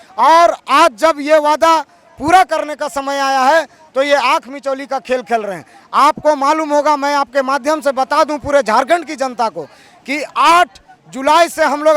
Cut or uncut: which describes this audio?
uncut